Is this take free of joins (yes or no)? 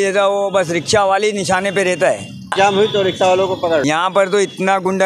no